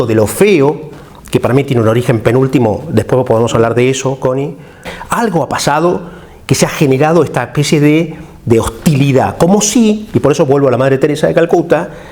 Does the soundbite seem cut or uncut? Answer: cut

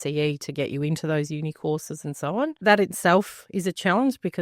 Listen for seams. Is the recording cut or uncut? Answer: cut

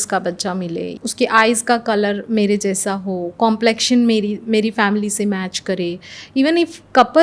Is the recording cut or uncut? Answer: cut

